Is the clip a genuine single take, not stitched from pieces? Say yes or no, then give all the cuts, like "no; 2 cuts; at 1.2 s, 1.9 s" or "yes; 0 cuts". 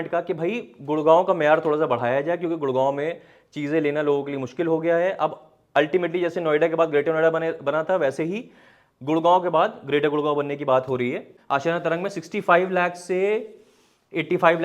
no; 1 cut; at 11.3 s